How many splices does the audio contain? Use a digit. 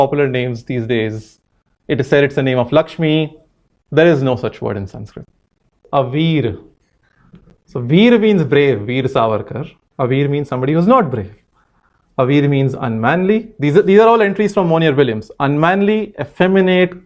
1